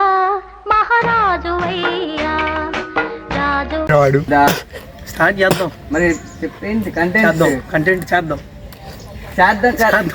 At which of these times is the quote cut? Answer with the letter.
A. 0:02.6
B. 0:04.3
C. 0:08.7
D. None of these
B